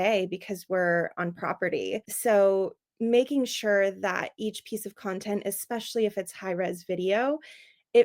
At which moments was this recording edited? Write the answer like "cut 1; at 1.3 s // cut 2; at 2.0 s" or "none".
cut 1; at 2.1 s